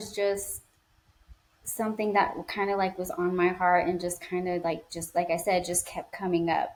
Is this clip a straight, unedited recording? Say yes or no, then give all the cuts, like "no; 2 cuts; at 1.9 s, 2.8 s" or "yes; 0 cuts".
yes; 0 cuts